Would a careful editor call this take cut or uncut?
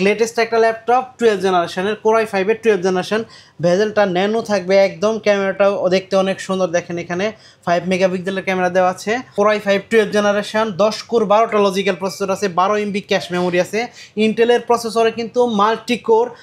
uncut